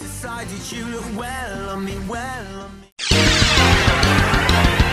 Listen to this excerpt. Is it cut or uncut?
uncut